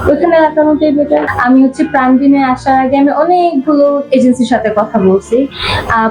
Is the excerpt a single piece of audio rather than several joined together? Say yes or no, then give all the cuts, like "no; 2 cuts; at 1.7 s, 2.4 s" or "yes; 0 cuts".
no; 1 cut; at 1.3 s